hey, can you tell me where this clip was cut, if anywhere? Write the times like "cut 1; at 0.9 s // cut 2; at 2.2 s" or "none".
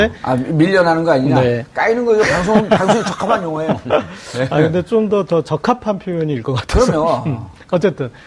cut 1; at 5.6 s